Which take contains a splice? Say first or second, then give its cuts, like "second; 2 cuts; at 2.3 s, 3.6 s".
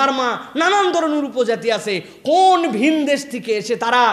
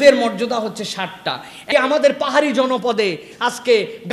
second; 1 cut; at 1.7 s